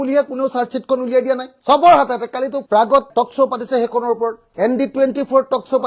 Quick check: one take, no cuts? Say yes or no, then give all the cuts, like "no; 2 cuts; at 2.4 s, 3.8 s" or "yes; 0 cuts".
yes; 0 cuts